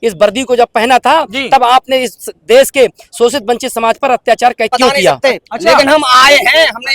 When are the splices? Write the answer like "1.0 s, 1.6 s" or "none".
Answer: 5.2 s

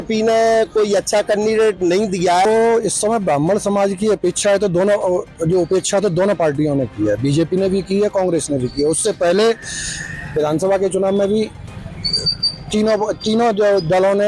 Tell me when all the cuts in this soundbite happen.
2.4 s

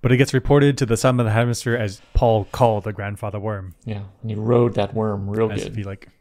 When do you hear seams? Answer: none

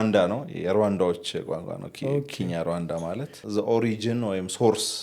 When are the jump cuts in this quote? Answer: 3.4 s

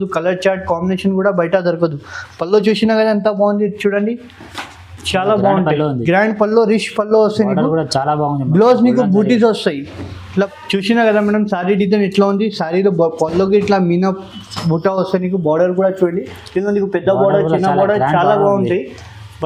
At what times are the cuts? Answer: 10.5 s

